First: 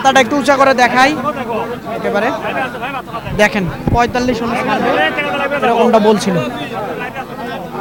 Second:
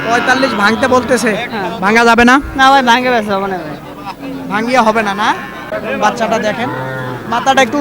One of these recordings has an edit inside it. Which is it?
second; 1 cut; at 5.7 s

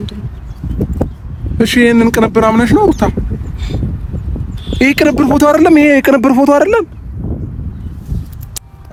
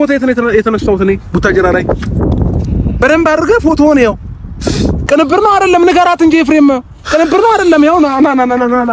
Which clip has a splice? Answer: second; 1 cut; at 5.0 s

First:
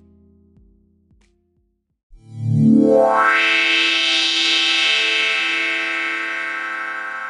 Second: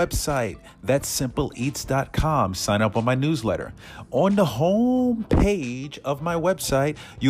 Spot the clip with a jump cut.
first; 1 cut; at 2.2 s

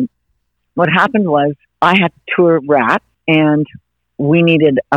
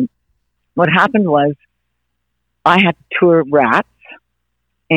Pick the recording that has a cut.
first; 2 cuts; at 1.6 s, 3.1 s

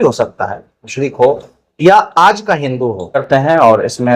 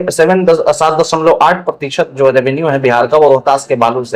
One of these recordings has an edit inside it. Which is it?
first; 1 cut; at 3.2 s

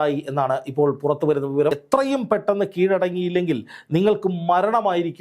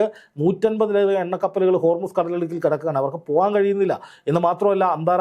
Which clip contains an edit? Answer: first; 1 cut; at 1.7 s

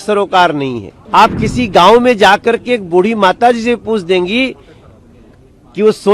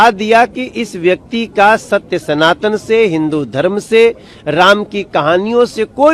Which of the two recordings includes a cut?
first; 1 cut; at 0.9 s

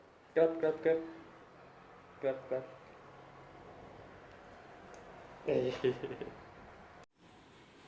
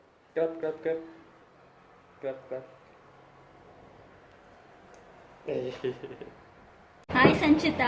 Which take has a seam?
first; 1 cut; at 7.0 s

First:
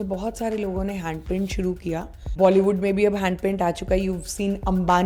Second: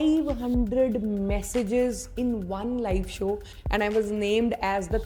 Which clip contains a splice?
first; 1 cut; at 2.2 s

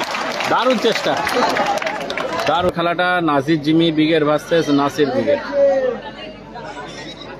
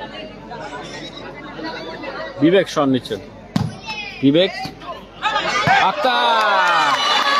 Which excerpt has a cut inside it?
first; 1 cut; at 2.7 s

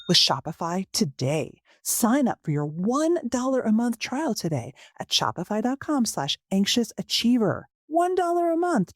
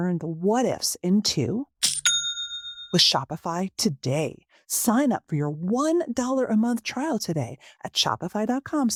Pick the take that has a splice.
first; 1 cut; at 7.7 s

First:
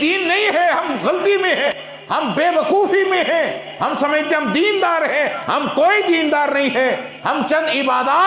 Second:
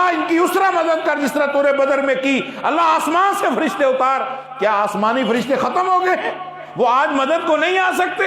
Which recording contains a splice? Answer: first; 1 cut; at 1.9 s

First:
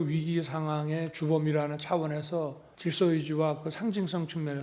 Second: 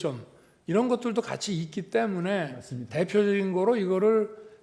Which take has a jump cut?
first; 1 cut; at 2.6 s

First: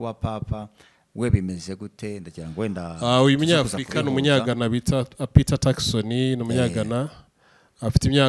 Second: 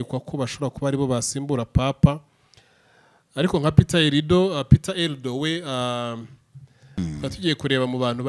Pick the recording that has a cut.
second; 1 cut; at 6.8 s

